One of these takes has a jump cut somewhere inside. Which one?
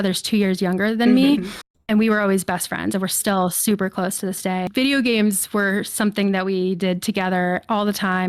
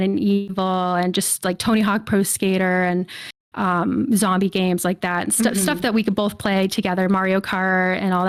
first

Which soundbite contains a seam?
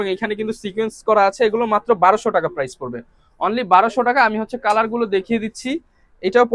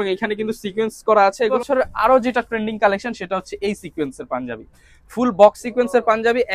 second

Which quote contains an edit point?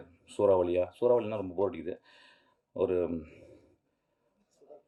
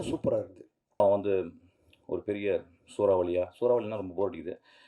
second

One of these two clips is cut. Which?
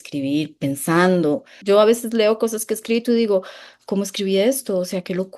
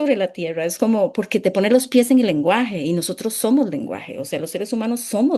first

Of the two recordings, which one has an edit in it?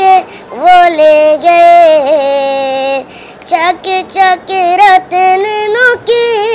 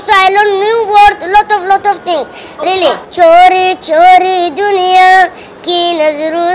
second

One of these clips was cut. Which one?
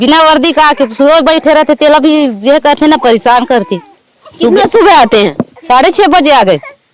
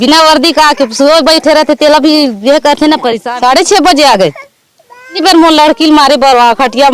second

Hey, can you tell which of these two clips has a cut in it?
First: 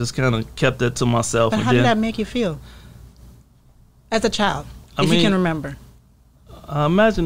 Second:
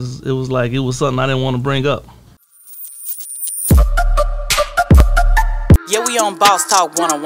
second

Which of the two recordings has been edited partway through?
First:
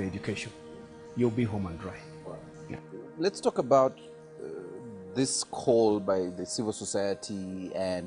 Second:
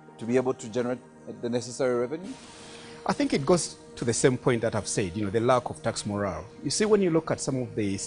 second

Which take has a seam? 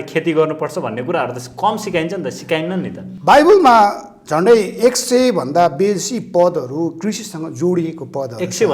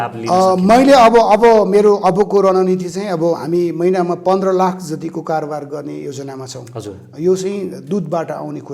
first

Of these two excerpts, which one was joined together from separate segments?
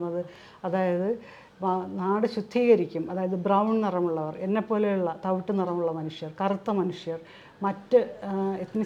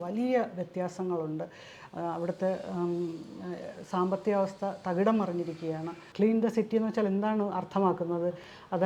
second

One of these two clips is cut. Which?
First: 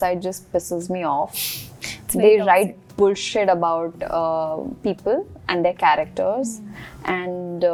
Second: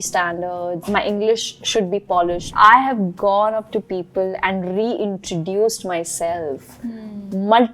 second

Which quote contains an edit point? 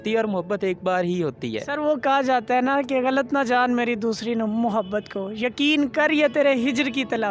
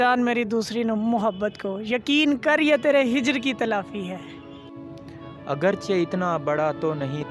second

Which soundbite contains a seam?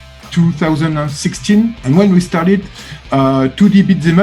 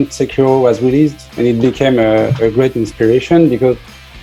first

